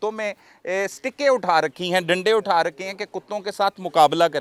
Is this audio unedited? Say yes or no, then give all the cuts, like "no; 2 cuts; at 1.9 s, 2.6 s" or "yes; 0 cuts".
yes; 0 cuts